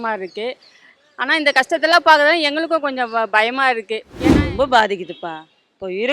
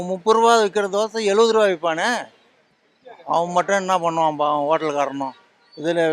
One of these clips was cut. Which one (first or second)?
first